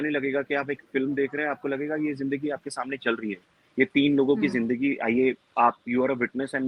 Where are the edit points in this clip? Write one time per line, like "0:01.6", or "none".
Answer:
none

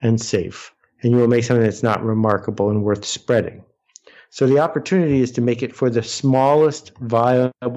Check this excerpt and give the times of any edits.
none

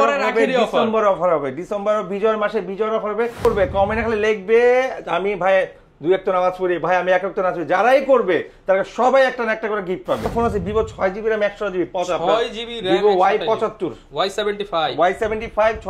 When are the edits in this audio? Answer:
0:03.5
0:10.3

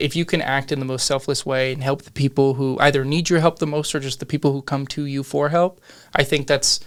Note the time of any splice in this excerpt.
none

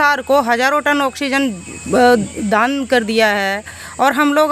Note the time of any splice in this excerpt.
none

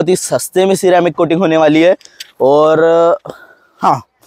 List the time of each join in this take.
none

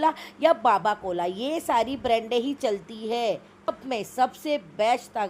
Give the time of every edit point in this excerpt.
0:03.7

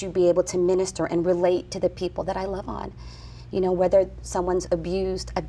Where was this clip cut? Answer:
none

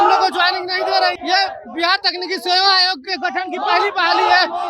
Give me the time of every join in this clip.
0:01.2

